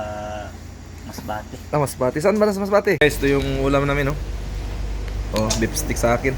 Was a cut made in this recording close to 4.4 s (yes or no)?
no